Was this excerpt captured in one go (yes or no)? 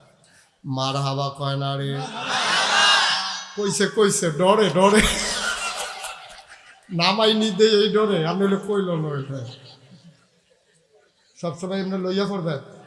yes